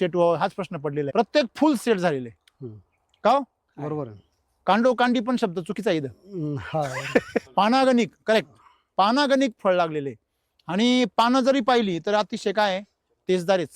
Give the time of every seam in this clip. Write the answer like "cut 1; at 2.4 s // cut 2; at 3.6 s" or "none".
cut 1; at 1.1 s // cut 2; at 7.5 s